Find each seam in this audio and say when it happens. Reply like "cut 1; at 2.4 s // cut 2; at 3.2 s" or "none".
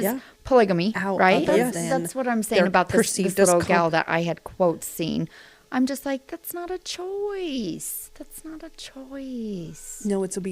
cut 1; at 1.8 s